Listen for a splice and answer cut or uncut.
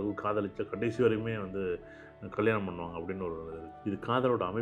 cut